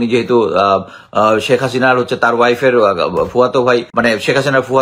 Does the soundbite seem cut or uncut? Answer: cut